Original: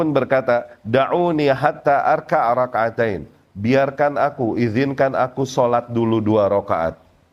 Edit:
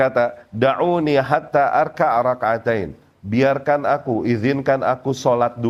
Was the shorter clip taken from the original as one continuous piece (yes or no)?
yes